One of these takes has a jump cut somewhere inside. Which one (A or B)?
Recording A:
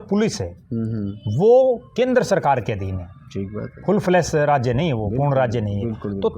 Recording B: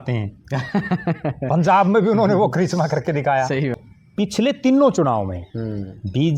B